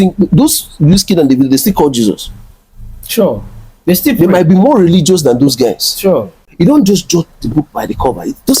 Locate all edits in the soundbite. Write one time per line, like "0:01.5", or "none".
0:06.3